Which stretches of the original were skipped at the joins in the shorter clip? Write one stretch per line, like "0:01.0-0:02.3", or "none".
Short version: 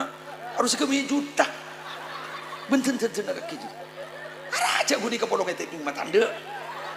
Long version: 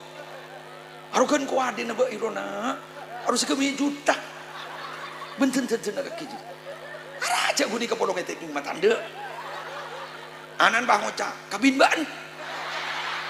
none

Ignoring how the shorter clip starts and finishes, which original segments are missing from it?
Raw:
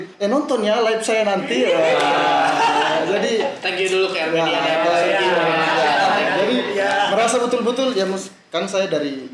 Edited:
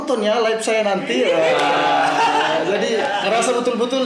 0:03.5-0:07.0

